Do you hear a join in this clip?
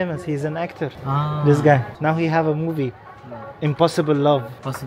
yes; 2 cuts; at 1.0 s, 1.9 s

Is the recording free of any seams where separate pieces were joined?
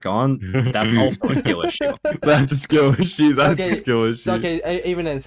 yes; 0 cuts

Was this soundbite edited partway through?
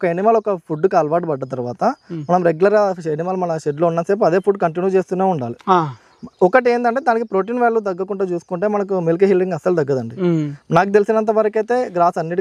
no; 0 cuts

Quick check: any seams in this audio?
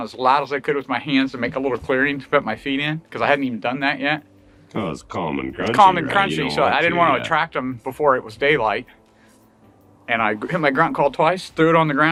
no; 0 cuts

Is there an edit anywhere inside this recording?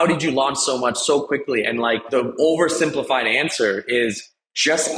yes; 1 cut; at 2.1 s

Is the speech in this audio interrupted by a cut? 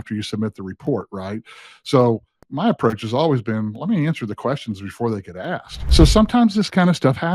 yes; 1 cut; at 5.7 s

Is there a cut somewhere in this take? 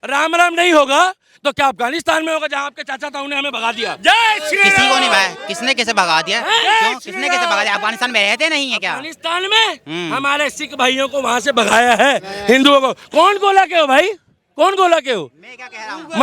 no; 0 cuts

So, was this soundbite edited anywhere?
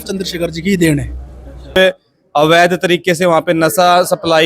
yes; 1 cut; at 1.8 s

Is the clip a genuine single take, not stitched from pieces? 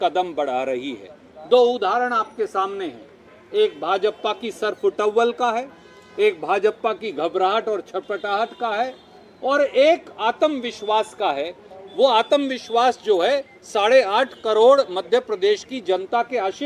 yes; 0 cuts

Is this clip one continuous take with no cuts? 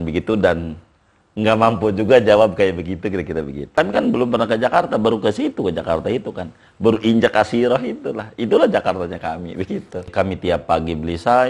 no; 2 cuts; at 3.7 s, 10.1 s

